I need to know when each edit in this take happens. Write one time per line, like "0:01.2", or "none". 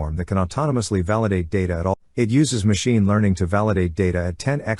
0:01.8